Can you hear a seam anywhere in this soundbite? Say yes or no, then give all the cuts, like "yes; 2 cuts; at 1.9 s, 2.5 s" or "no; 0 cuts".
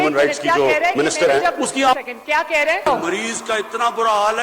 yes; 1 cut; at 2.9 s